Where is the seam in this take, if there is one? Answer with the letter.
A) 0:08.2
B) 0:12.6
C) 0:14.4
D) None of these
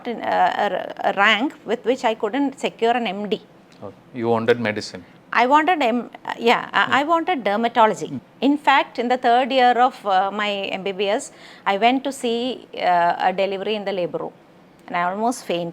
A